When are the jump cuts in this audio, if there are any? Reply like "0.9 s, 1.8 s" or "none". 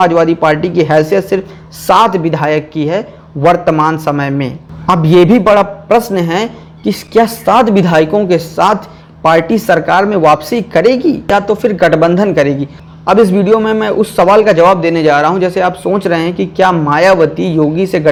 none